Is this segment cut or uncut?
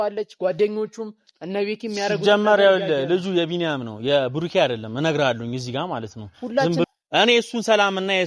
cut